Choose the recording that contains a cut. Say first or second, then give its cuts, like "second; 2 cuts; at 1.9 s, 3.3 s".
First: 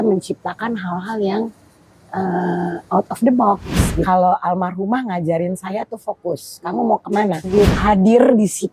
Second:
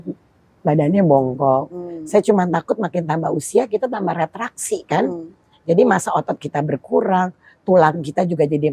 first; 2 cuts; at 4.1 s, 7.5 s